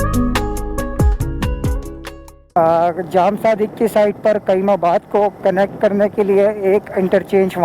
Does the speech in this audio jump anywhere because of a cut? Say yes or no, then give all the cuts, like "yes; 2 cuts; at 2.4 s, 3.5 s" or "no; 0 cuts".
yes; 1 cut; at 2.5 s